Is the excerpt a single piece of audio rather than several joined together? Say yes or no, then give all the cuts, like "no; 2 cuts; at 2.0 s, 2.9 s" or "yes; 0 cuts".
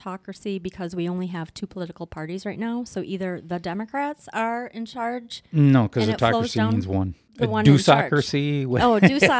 no; 1 cut; at 7.2 s